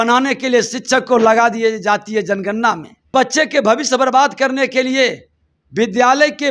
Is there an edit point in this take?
yes; 1 cut; at 3.1 s

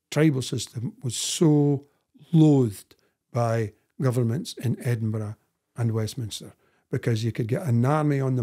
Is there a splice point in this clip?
no; 0 cuts

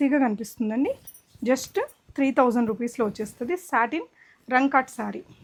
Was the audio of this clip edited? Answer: no; 0 cuts

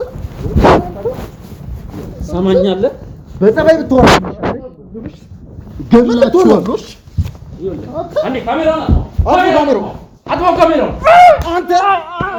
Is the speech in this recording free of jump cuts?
yes; 0 cuts

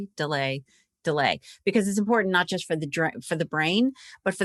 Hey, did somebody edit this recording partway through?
no; 0 cuts

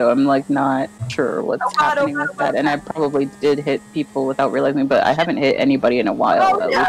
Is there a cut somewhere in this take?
yes; 1 cut; at 1.0 s

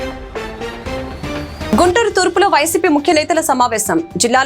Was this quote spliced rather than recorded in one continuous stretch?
yes; 1 cut; at 1.7 s

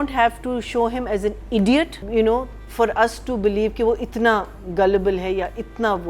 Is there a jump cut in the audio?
yes; 1 cut; at 2.0 s

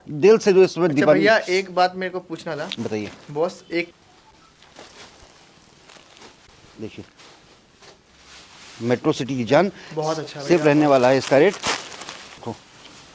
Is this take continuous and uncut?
no; 2 cuts; at 3.9 s, 12.4 s

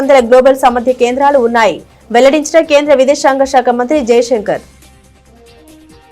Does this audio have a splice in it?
yes; 1 cut; at 4.7 s

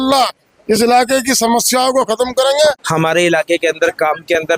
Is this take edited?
yes; 1 cut; at 2.8 s

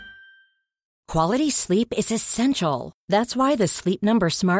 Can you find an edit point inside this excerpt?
yes; 1 cut; at 1.0 s

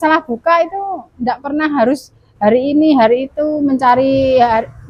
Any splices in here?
no; 0 cuts

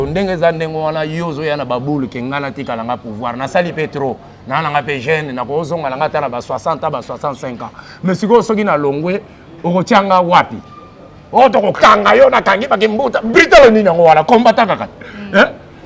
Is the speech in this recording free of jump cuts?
yes; 0 cuts

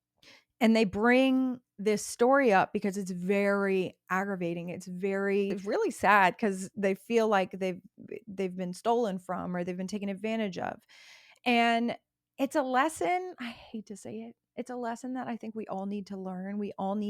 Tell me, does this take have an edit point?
yes; 1 cut; at 5.6 s

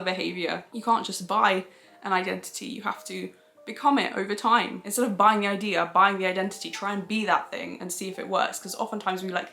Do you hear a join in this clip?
yes; 1 cut; at 4.9 s

